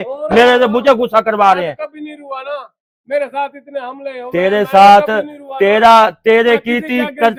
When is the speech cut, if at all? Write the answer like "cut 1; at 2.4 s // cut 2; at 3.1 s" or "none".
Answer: none